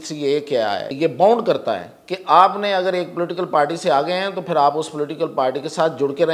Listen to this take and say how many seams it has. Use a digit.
1